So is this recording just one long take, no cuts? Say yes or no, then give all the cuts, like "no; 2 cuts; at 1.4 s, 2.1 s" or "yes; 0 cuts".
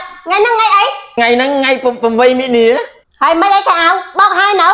no; 2 cuts; at 1.2 s, 3.0 s